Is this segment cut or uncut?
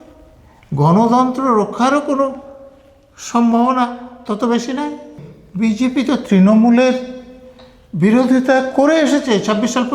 cut